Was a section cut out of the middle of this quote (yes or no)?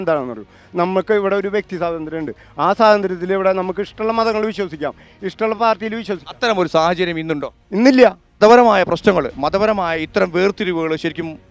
yes